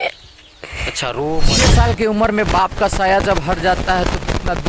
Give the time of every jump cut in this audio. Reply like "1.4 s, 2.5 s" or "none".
1.5 s